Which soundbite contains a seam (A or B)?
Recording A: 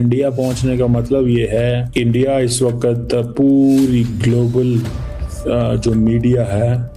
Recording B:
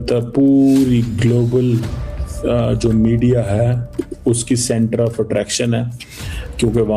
A